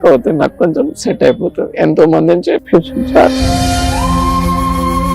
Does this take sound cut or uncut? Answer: cut